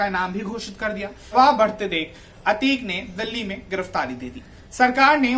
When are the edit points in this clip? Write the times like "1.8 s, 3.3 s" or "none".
1.3 s